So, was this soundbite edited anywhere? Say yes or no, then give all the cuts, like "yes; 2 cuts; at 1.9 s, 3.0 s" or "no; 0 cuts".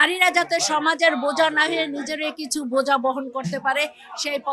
no; 0 cuts